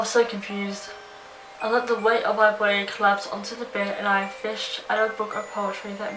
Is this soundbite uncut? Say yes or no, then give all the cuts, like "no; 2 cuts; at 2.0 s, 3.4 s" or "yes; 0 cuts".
yes; 0 cuts